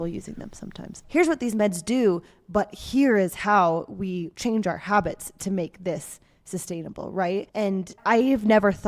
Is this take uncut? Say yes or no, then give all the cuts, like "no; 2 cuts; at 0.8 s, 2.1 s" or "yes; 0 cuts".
no; 1 cut; at 1.0 s